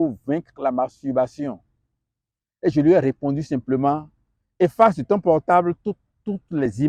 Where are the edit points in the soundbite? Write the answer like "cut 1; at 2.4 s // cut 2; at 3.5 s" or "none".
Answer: none